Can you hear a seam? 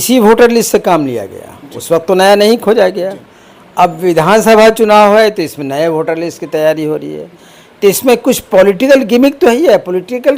no; 0 cuts

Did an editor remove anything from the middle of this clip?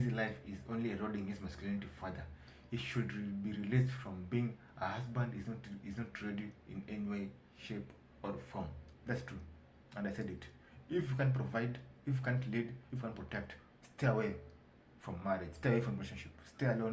no; 0 cuts

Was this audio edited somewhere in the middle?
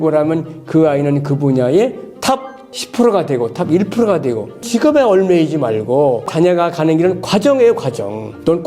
yes; 1 cut; at 4.5 s

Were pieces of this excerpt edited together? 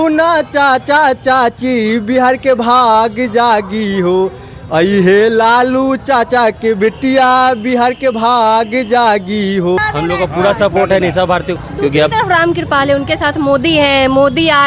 yes; 2 cuts; at 9.8 s, 11.5 s

